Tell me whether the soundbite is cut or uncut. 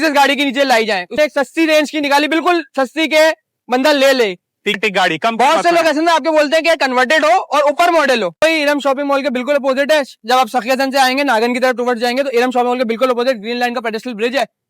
cut